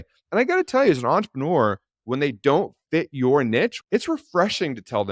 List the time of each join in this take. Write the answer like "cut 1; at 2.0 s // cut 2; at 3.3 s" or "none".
cut 1; at 3.8 s